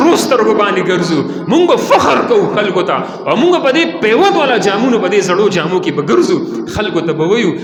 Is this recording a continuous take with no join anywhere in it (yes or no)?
yes